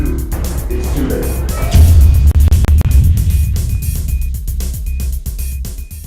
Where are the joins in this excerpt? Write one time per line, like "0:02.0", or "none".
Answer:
0:03.2